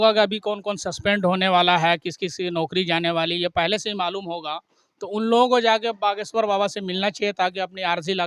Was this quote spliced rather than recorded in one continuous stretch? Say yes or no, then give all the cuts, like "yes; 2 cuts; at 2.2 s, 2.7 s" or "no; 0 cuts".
no; 0 cuts